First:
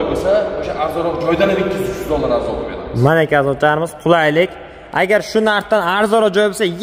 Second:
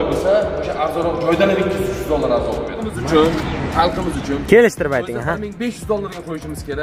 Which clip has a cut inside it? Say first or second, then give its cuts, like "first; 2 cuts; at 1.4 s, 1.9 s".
second; 1 cut; at 3.0 s